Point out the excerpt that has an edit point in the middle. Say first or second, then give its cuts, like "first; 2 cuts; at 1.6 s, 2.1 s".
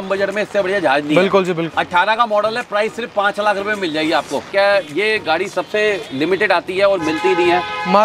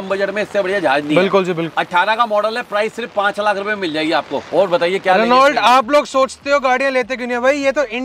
first; 1 cut; at 4.5 s